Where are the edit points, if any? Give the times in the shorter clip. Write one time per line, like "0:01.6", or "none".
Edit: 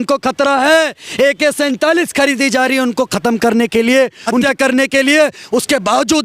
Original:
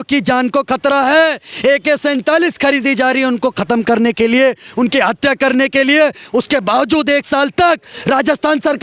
0:04.4